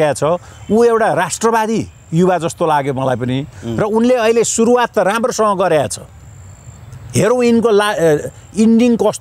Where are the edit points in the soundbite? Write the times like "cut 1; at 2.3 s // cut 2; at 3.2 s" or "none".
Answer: none